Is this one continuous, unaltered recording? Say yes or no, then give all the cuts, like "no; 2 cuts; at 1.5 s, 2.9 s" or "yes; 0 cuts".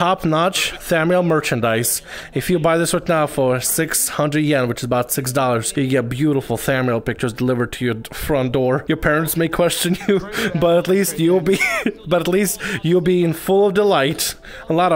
no; 2 cuts; at 5.7 s, 8.8 s